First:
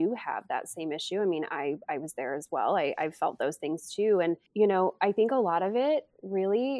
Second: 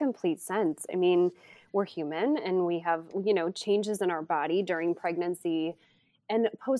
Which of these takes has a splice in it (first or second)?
first